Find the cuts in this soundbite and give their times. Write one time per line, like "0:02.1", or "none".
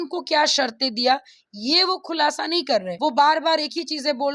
0:02.9